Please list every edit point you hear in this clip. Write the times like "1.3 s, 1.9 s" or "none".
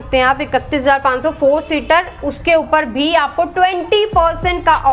none